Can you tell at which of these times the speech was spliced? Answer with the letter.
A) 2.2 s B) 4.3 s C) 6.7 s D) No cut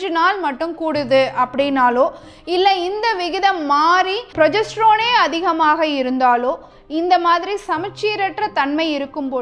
B